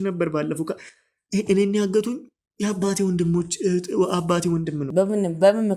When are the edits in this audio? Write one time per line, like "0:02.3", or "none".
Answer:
0:04.8